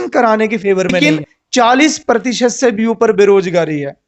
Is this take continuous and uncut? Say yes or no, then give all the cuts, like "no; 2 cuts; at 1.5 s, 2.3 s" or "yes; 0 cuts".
no; 1 cut; at 1.0 s